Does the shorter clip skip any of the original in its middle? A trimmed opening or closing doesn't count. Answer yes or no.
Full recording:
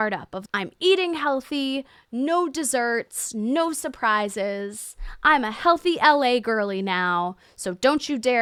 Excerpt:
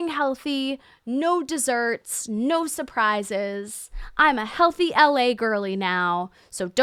no